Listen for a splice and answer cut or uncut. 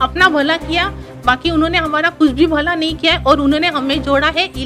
uncut